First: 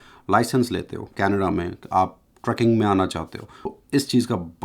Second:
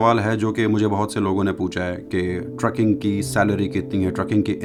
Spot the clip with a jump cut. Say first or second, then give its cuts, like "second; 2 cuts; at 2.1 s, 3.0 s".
first; 1 cut; at 3.7 s